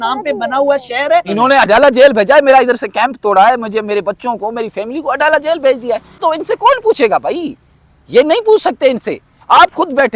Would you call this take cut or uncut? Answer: cut